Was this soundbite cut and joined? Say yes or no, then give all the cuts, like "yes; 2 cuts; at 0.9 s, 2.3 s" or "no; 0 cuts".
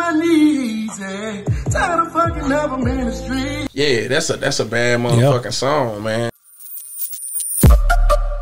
yes; 1 cut; at 6.4 s